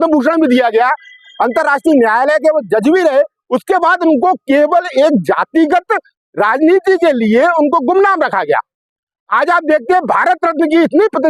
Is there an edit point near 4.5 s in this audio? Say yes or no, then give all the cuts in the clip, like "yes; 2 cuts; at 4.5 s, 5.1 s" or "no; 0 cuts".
no; 0 cuts